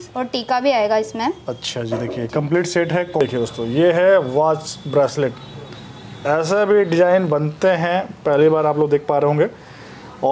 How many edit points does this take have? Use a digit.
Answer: 1